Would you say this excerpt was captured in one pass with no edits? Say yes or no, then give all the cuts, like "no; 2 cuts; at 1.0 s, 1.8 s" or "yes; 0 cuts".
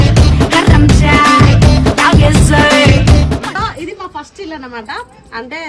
no; 1 cut; at 3.5 s